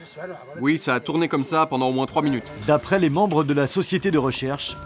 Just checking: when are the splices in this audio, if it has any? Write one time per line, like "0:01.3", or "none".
0:02.5